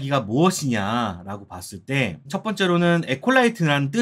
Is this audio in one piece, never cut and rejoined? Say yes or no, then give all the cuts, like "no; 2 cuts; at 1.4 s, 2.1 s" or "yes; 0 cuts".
no; 1 cut; at 2.3 s